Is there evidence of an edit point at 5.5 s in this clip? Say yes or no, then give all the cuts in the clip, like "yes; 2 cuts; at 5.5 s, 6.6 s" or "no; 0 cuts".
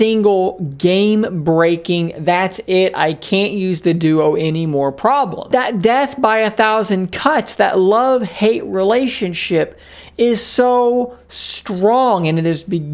yes; 1 cut; at 5.5 s